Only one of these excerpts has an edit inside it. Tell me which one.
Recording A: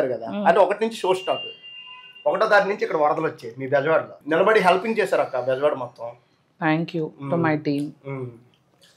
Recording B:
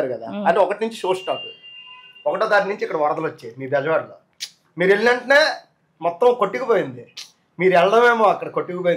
A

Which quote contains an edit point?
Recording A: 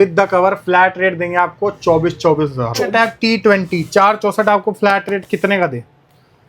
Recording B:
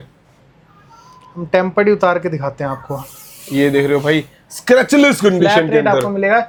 A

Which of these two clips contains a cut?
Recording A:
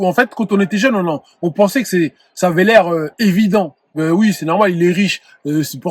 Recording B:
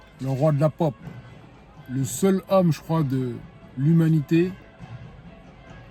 A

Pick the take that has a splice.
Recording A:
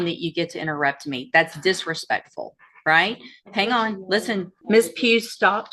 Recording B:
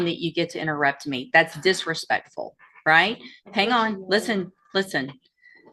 A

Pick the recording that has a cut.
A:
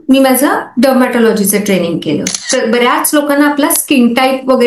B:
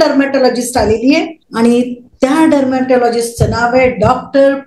A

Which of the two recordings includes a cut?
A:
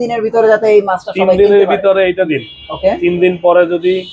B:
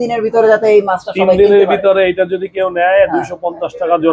A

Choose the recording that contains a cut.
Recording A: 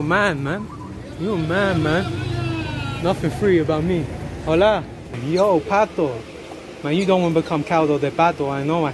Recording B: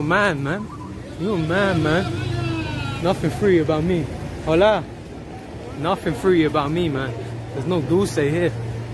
A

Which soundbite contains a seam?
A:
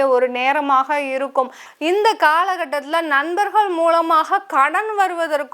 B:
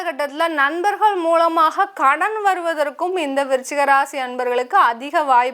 A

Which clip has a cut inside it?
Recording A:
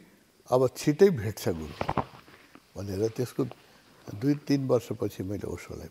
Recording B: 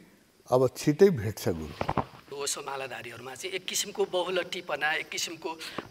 B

